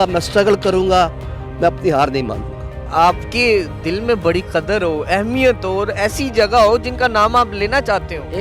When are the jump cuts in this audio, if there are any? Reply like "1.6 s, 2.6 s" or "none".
none